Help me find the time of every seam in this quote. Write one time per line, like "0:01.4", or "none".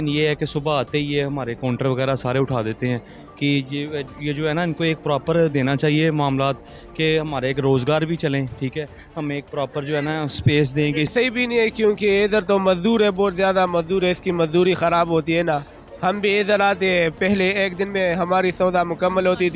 0:11.1